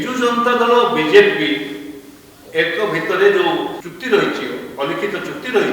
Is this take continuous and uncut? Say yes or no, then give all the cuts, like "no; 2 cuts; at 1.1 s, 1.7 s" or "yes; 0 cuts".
no; 1 cut; at 3.8 s